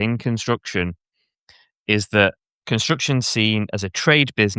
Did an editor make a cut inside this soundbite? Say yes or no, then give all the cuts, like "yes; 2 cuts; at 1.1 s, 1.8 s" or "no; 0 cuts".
yes; 1 cut; at 2.5 s